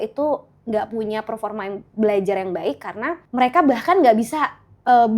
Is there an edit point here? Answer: yes; 1 cut; at 3.2 s

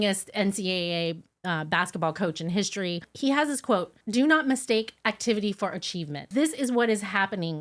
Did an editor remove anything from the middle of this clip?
yes; 3 cuts; at 3.1 s, 4.0 s, 6.3 s

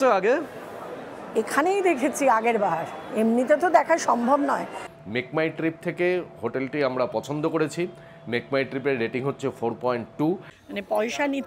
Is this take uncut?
no; 2 cuts; at 5.0 s, 10.5 s

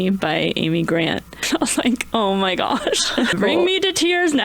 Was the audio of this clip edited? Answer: yes; 2 cuts; at 1.4 s, 3.3 s

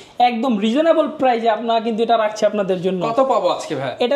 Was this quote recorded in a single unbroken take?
yes; 0 cuts

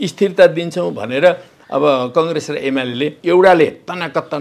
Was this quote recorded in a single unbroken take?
no; 1 cut; at 3.2 s

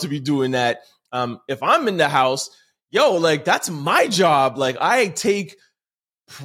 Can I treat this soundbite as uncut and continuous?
yes; 0 cuts

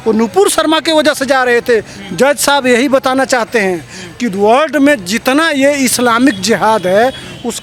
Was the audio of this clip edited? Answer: no; 0 cuts

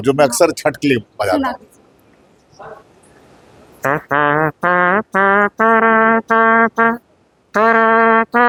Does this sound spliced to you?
no; 0 cuts

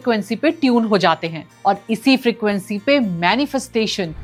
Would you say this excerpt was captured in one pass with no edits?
yes; 0 cuts

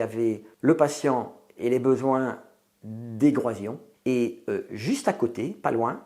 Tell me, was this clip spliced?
no; 0 cuts

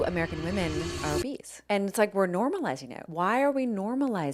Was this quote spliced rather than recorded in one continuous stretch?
yes; 2 cuts; at 1.3 s, 3.0 s

